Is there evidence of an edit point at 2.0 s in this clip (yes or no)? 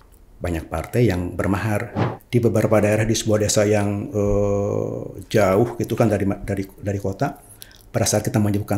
yes